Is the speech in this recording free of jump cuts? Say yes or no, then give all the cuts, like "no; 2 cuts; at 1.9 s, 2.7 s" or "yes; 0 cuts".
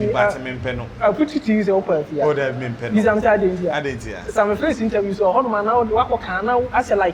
yes; 0 cuts